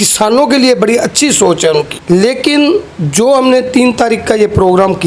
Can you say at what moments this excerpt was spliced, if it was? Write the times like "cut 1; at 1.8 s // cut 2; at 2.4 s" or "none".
cut 1; at 1.9 s